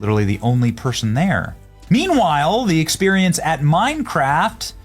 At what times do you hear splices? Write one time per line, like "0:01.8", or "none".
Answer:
0:01.7